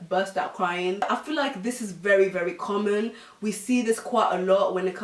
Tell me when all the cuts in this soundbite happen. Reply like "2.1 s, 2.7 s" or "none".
1.0 s